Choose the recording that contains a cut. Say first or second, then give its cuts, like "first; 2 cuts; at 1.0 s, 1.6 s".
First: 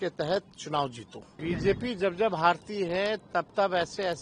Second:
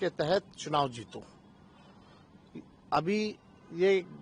first; 1 cut; at 1.2 s